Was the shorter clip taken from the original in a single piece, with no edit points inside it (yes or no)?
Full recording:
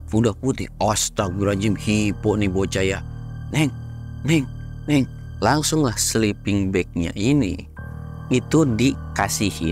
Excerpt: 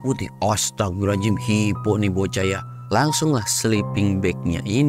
no